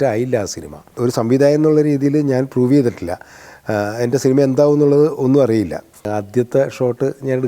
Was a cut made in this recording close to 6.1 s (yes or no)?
yes